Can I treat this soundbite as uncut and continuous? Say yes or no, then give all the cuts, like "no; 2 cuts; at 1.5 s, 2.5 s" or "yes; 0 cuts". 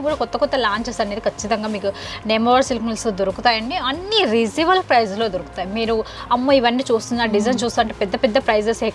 yes; 0 cuts